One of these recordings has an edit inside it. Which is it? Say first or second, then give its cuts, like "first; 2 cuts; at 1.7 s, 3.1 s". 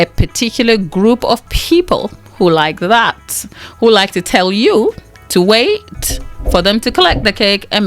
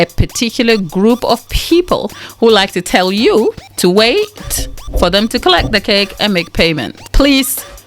second; 3 cuts; at 2.2 s, 3.7 s, 7.0 s